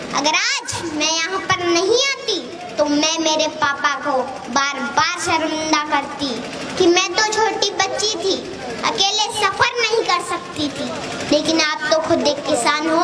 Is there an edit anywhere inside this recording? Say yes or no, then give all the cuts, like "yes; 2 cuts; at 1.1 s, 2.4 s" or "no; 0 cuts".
no; 0 cuts